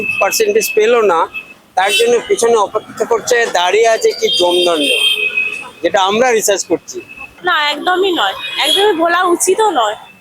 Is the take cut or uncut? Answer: cut